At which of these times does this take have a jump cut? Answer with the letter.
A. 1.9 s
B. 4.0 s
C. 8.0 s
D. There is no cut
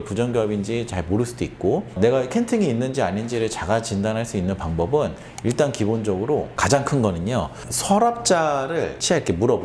A